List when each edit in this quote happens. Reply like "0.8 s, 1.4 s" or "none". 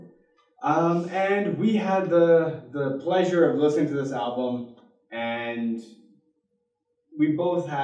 1.5 s